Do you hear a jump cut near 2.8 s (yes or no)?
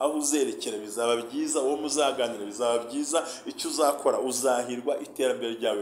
no